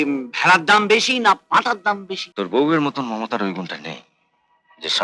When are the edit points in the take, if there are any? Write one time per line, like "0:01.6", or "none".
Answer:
0:02.2